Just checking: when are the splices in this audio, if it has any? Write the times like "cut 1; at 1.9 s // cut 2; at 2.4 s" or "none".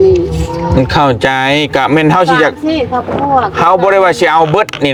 none